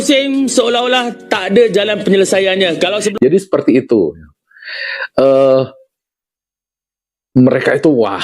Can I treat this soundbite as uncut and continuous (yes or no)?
no